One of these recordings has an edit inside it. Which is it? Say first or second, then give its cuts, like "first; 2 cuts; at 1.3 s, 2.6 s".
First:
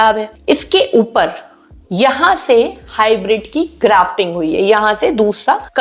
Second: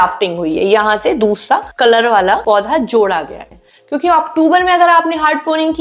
second; 1 cut; at 3.4 s